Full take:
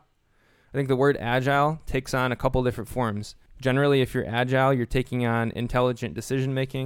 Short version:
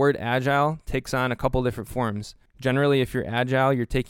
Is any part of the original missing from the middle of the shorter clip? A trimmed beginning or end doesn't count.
no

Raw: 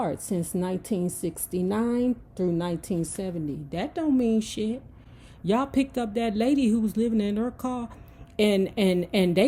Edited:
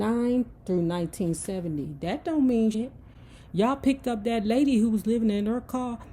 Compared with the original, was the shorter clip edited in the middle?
yes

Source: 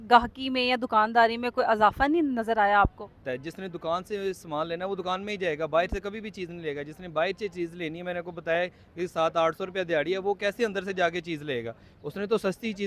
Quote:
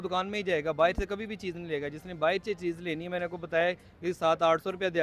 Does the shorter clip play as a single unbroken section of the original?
yes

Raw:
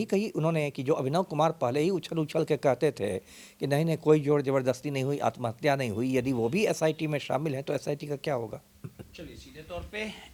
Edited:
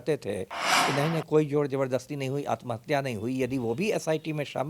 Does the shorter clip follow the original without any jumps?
yes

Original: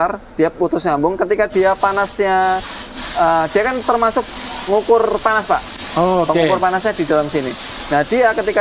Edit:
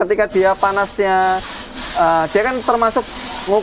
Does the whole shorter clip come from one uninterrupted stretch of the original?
yes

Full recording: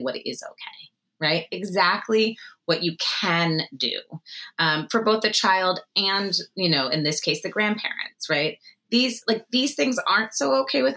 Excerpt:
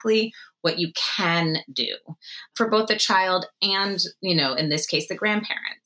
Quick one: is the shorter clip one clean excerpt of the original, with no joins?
no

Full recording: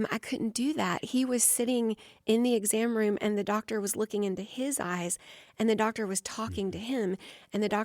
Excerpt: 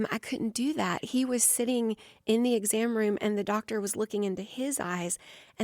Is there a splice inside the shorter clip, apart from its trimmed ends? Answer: no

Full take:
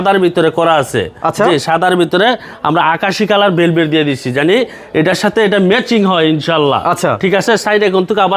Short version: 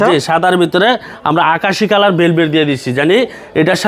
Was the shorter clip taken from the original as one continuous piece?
yes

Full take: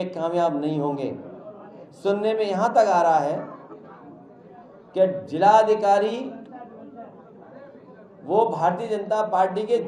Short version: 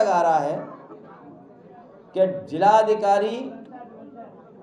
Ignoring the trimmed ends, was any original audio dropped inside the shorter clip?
no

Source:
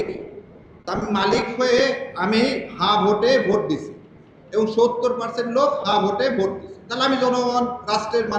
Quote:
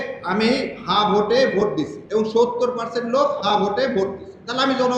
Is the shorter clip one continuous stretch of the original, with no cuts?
no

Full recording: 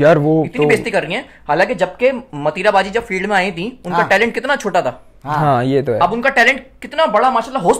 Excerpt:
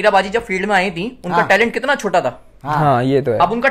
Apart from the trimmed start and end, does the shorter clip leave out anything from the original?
no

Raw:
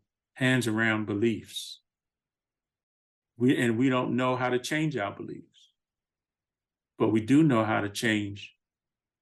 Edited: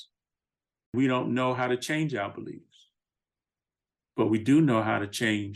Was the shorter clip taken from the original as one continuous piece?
no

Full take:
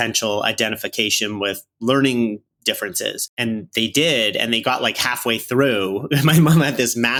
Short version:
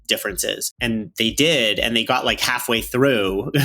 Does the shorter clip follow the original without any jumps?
yes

